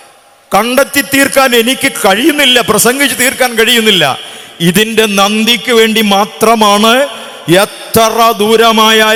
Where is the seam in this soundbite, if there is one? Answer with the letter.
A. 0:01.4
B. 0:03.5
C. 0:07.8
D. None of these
D